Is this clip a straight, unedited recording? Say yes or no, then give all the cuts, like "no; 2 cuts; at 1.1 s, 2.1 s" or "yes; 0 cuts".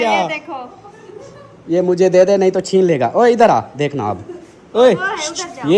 yes; 0 cuts